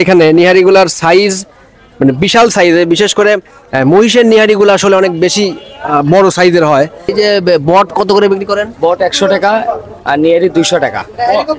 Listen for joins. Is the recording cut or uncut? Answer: cut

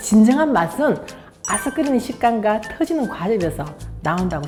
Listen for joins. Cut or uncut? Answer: uncut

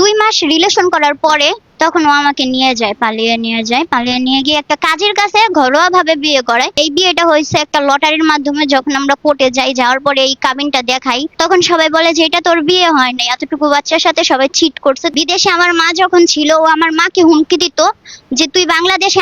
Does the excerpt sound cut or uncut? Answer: cut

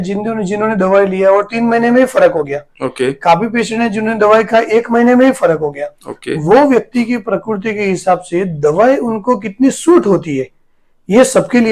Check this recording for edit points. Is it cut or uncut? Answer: uncut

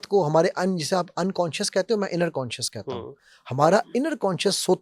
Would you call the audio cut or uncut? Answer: uncut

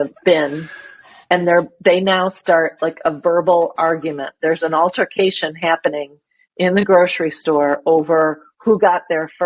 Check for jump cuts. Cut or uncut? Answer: uncut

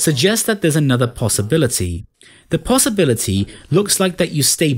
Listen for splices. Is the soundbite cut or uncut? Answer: uncut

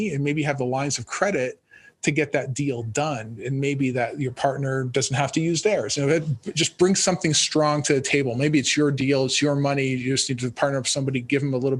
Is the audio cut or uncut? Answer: uncut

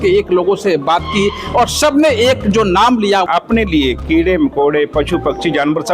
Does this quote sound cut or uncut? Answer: cut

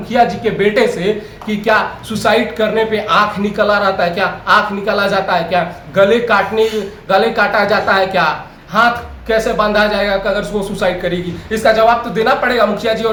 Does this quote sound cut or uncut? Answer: uncut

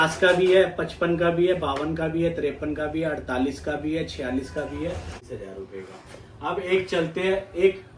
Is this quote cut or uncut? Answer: cut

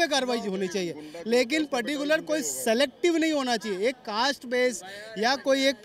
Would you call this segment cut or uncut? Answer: uncut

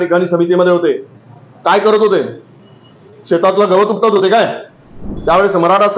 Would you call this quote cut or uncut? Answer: cut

